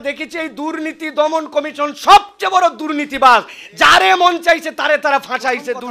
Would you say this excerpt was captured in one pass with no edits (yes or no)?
yes